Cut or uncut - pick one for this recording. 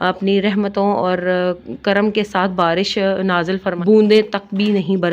cut